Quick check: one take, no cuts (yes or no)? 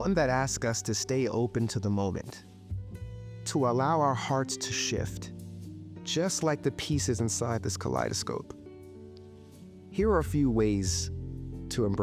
yes